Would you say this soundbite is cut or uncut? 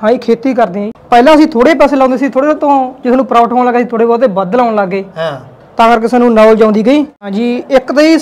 cut